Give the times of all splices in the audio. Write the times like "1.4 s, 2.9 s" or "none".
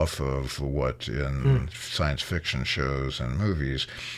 none

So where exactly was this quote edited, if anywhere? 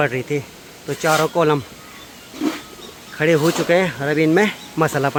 none

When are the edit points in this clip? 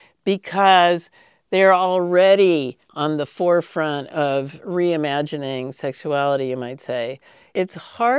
none

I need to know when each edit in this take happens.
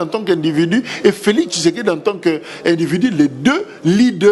none

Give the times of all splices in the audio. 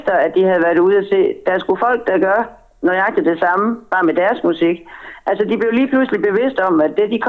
none

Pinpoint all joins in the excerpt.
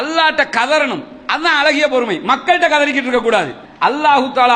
3.6 s

